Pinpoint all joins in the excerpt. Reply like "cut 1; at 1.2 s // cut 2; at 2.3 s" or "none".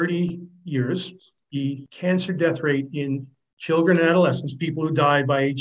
cut 1; at 1.5 s